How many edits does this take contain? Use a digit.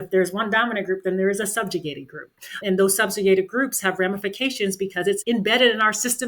1